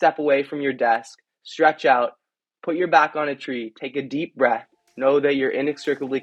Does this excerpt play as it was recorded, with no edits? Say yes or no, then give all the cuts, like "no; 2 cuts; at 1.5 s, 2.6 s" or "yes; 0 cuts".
yes; 0 cuts